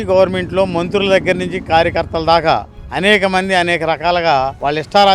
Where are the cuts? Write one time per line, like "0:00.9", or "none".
none